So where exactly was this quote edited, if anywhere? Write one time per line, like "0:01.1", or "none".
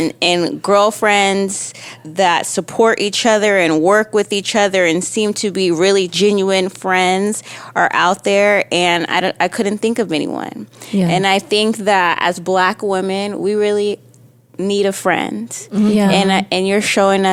0:02.0

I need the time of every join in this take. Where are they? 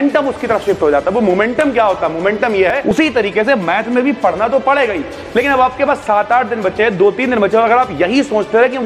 0:02.9

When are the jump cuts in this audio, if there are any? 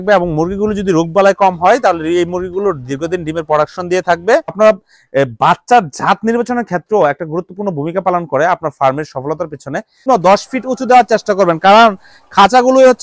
0:04.5
0:10.0

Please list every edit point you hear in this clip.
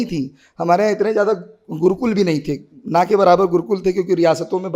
none

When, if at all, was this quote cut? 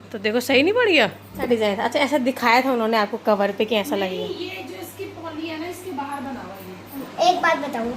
0:01.5
0:07.0

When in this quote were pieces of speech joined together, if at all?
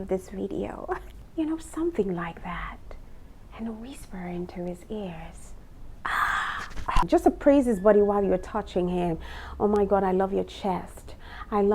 0:01.1
0:07.0

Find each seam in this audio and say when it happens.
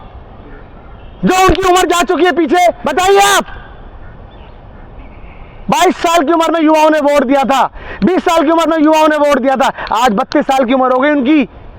0:02.8

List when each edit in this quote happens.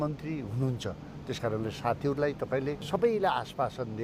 0:02.8

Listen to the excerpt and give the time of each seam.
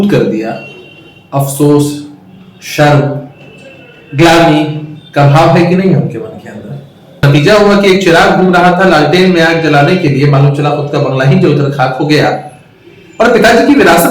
0:07.2

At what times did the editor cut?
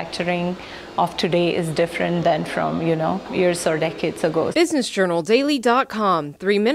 0:04.5

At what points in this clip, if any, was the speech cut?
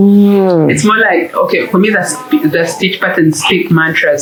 none

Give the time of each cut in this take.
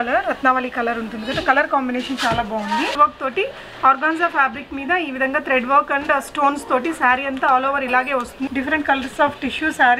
0:02.9
0:08.5

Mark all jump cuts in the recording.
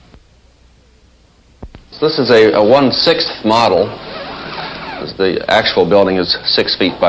0:04.4

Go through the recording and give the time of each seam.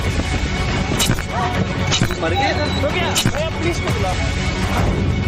0:03.9

